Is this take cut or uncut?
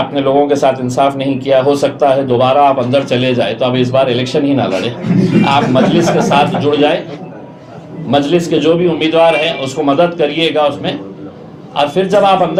uncut